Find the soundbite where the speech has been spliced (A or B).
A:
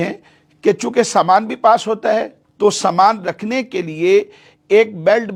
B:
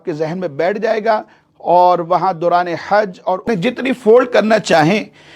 B